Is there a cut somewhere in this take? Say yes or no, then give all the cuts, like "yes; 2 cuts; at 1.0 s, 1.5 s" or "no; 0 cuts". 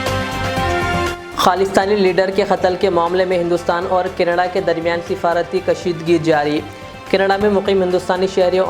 yes; 1 cut; at 1.0 s